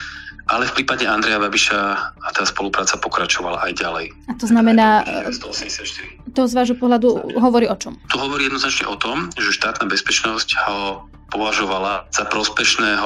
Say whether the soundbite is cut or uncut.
cut